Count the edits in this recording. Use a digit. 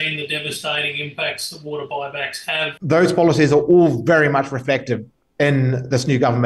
1